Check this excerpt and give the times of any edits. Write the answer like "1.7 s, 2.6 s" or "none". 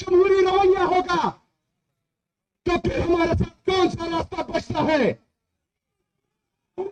none